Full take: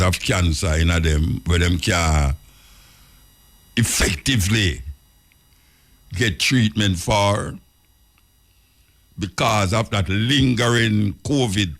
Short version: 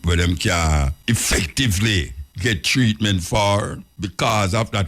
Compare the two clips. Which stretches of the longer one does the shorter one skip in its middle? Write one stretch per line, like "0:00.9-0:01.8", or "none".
0:02.4-0:03.6
0:04.9-0:06.0
0:07.6-0:09.0